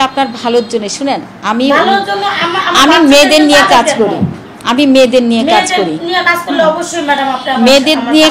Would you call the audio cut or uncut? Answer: uncut